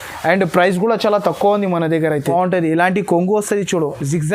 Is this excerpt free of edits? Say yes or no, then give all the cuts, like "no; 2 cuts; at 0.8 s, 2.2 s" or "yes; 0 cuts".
no; 1 cut; at 2.3 s